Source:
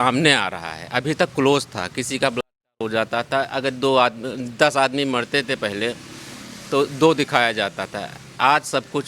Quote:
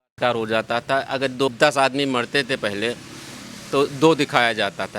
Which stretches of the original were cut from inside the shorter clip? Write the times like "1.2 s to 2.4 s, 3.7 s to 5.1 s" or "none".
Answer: 3.9 s to 4.5 s